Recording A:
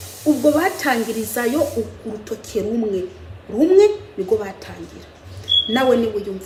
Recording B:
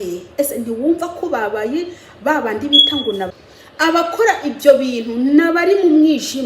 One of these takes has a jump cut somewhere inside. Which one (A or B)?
B